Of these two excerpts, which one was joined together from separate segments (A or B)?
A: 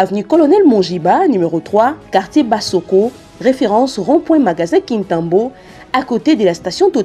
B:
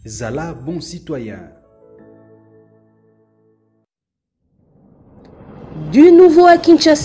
B